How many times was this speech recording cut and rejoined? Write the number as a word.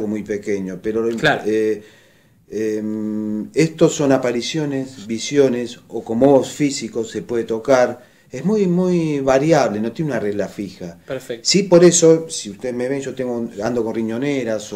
one